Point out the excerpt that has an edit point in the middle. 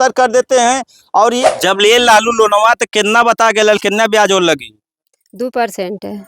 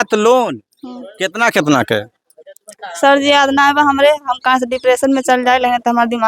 first; 1 cut; at 1.4 s

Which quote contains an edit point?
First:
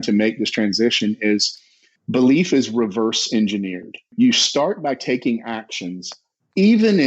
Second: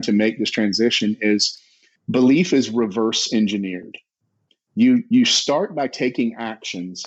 first; 1 cut; at 4.1 s

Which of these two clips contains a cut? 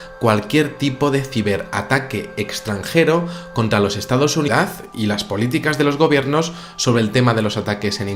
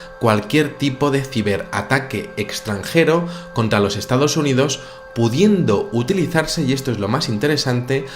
second; 1 cut; at 4.5 s

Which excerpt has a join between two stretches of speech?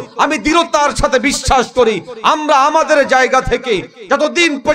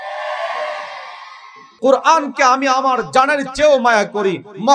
second; 1 cut; at 1.7 s

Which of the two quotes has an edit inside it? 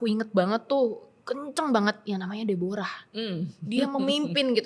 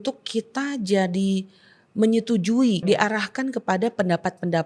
second; 1 cut; at 2.8 s

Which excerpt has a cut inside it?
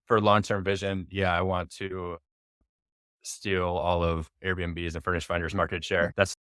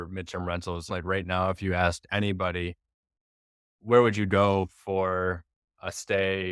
second; 1 cut; at 0.9 s

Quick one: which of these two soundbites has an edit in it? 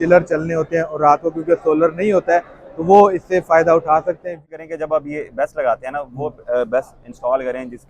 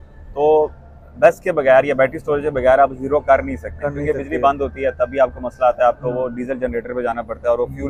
first; 1 cut; at 4.4 s

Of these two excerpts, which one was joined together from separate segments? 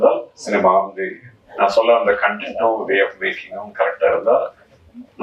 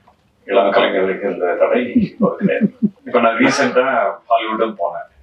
second; 1 cut; at 3.0 s

